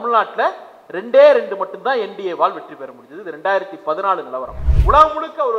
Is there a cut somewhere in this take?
yes; 1 cut; at 4.7 s

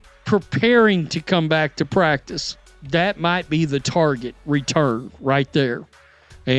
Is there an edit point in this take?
no; 0 cuts

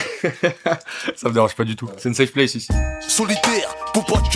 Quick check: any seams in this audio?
yes; 2 cuts; at 1.9 s, 2.7 s

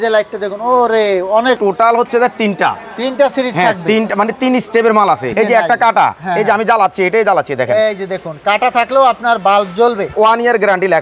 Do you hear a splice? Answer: yes; 3 cuts; at 1.6 s, 5.3 s, 10.1 s

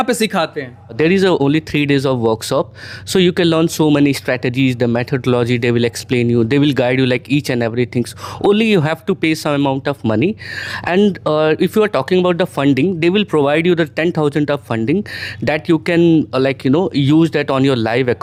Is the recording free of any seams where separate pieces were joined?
yes; 0 cuts

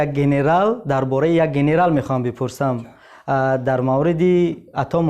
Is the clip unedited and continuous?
yes; 0 cuts

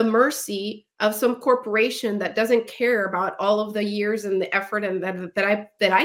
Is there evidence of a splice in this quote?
no; 0 cuts

